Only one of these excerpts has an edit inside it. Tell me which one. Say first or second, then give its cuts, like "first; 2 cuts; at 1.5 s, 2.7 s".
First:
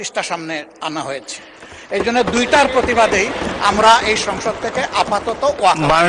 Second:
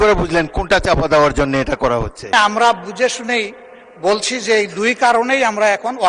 second; 1 cut; at 2.3 s